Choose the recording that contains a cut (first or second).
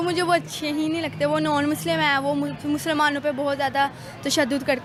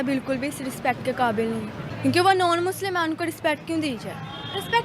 second